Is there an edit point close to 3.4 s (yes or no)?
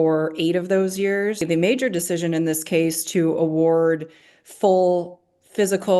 no